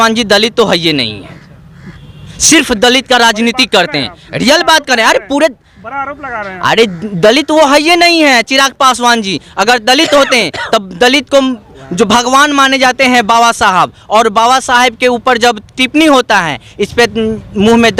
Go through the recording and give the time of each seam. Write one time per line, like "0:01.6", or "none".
none